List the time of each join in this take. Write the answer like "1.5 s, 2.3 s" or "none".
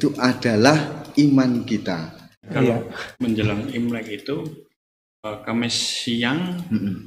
2.5 s

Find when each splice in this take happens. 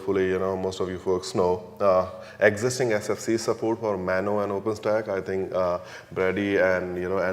1.6 s

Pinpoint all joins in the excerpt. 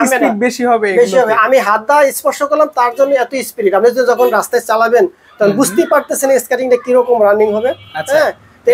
none

